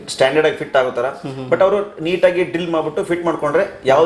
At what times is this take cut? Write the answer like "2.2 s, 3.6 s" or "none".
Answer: none